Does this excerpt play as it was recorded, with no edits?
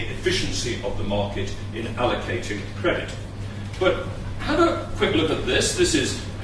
no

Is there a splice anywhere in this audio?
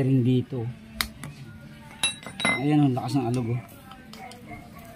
yes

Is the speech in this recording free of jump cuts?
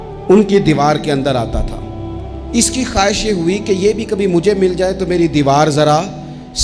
yes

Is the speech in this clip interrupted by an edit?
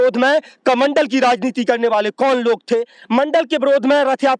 no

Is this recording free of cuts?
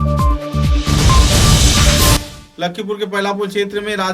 no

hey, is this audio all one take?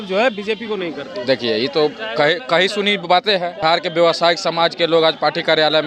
no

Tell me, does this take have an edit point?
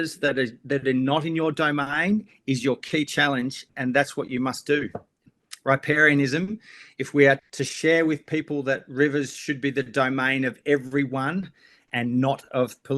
yes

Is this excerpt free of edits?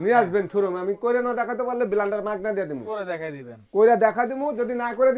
yes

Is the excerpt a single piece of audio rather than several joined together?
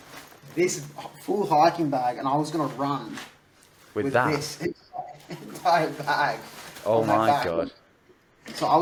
yes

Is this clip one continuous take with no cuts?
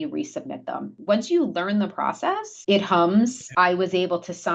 no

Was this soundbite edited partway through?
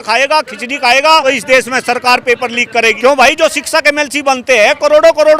yes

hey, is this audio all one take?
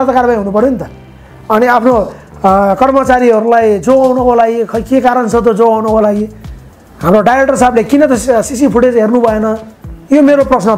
yes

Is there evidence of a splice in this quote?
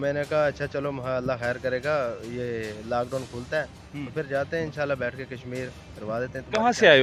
no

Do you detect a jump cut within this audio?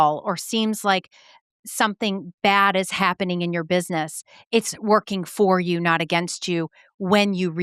no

